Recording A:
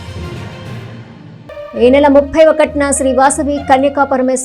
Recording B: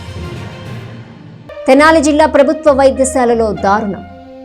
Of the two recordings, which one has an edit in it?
B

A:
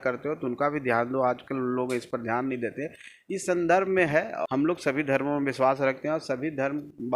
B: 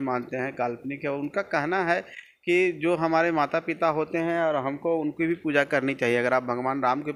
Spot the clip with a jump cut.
A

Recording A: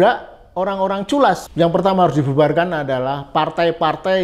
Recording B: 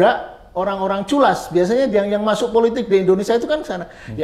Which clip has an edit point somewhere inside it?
A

